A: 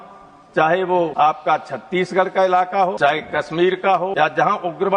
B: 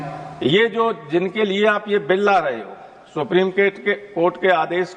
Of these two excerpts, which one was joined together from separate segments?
A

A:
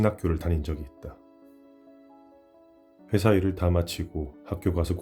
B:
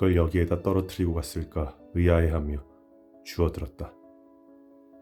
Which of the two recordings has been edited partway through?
A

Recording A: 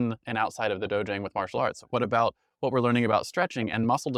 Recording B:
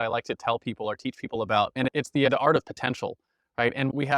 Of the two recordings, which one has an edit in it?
B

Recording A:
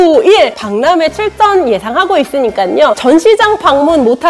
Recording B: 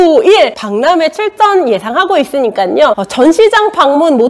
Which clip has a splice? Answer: A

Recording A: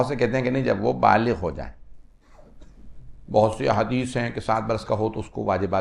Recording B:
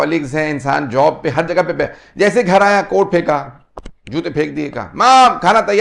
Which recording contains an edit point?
A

